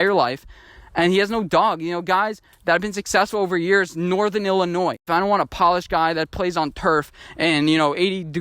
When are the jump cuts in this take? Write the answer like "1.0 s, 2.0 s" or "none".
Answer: 5.1 s